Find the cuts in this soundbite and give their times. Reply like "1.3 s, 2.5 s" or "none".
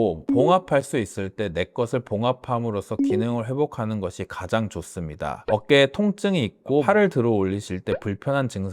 5.4 s